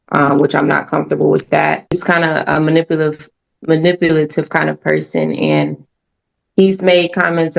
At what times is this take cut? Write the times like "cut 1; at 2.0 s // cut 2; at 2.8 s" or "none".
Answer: cut 1; at 2.0 s

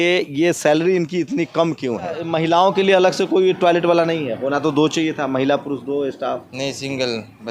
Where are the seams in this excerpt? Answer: cut 1; at 2.3 s

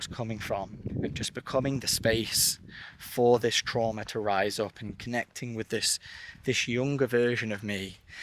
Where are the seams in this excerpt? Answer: cut 1; at 0.9 s

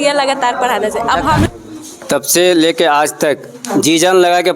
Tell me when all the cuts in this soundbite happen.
cut 1; at 1.5 s

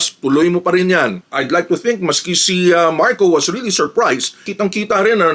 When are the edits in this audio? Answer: cut 1; at 1.2 s // cut 2; at 4.4 s

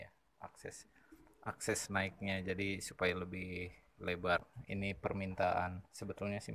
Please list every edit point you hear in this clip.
cut 1; at 4.6 s

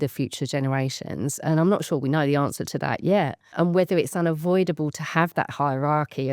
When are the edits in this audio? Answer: cut 1; at 3.5 s

